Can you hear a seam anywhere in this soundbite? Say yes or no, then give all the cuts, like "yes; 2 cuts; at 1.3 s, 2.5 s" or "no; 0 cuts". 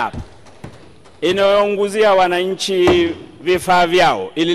no; 0 cuts